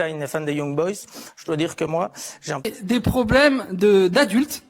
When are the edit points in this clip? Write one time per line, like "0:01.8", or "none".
0:02.7